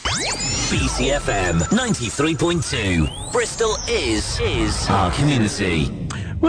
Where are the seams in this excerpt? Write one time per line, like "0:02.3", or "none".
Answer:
none

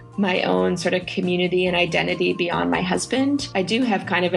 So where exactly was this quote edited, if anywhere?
0:03.5

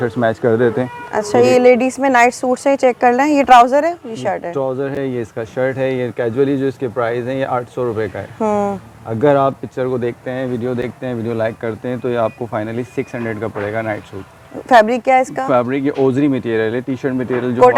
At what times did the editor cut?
none

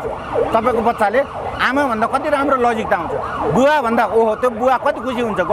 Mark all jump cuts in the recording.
none

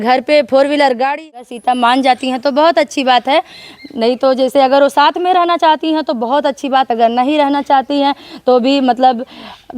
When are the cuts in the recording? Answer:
0:01.3

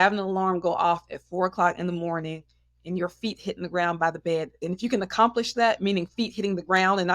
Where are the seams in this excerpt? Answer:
0:04.6

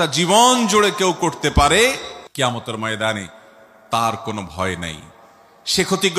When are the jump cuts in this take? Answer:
0:02.2

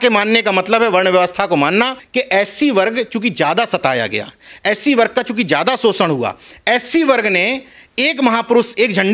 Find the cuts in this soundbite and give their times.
0:02.0

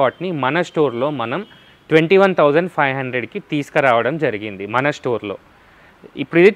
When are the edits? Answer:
none

